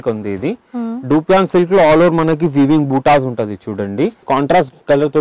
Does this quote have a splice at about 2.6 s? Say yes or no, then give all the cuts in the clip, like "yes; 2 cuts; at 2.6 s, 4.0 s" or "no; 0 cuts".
no; 1 cut; at 4.2 s